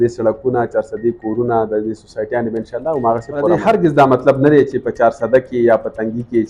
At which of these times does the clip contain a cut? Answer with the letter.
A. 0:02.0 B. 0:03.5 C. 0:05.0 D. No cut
B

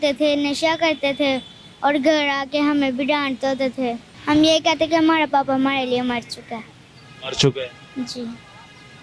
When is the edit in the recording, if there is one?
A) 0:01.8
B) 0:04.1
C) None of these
B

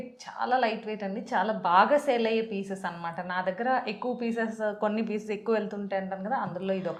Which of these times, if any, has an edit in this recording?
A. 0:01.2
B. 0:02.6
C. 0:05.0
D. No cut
D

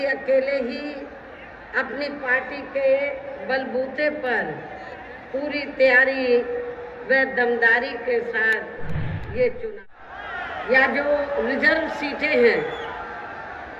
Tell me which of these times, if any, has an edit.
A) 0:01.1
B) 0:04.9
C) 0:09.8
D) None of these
C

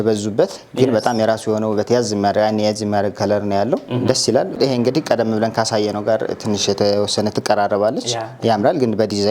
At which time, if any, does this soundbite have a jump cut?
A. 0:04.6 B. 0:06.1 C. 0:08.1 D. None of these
A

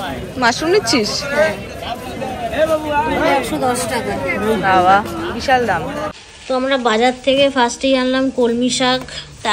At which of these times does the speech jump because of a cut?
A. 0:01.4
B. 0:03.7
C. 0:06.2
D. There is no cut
C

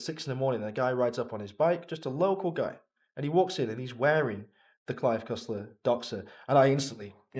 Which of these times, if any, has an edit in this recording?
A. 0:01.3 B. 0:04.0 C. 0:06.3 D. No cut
D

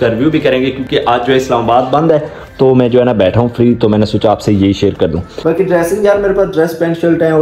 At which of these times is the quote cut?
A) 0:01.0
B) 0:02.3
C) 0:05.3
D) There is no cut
C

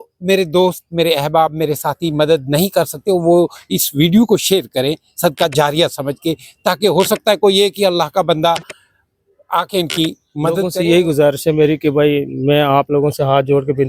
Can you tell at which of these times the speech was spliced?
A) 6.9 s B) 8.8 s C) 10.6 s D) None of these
C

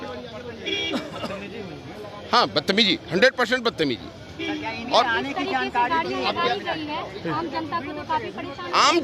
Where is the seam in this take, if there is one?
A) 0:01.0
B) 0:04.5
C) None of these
C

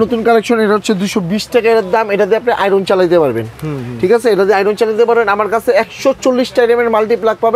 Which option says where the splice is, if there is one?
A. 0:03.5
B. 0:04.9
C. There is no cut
C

